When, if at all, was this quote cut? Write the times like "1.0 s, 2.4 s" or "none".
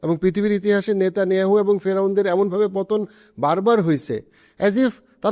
none